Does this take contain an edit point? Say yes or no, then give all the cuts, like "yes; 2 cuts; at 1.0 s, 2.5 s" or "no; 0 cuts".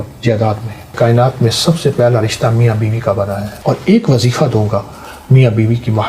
yes; 2 cuts; at 0.9 s, 3.5 s